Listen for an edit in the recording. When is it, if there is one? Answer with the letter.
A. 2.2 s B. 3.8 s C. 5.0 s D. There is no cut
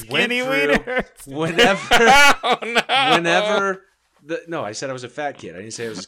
D